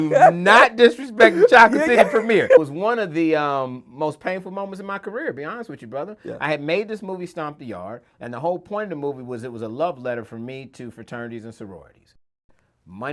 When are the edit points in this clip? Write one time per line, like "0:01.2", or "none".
0:02.7
0:12.3

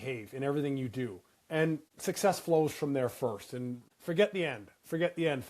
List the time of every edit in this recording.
0:01.8
0:03.9

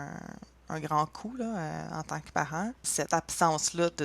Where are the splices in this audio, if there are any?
0:02.8

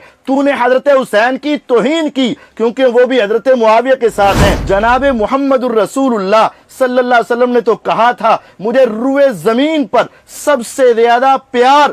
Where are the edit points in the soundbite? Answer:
0:04.6

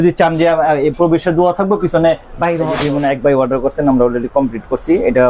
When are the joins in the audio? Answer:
0:02.8

